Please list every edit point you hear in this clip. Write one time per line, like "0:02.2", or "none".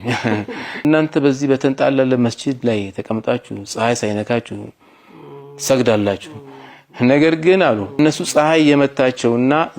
0:00.8
0:08.0

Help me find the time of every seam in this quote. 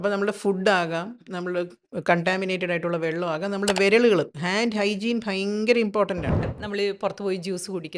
0:06.6

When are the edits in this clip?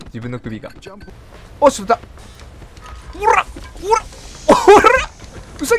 0:01.1

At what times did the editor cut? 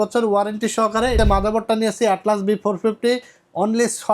0:01.2

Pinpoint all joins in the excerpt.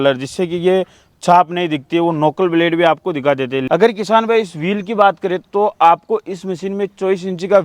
0:03.6

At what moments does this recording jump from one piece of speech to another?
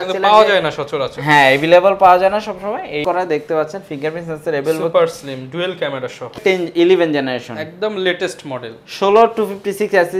0:03.0
0:06.3

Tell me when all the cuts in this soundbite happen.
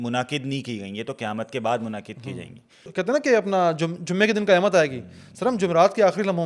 0:02.9

